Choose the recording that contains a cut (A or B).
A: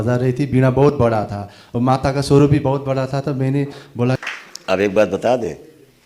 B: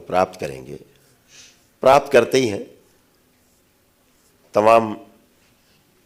A